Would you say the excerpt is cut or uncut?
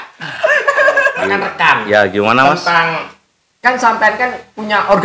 cut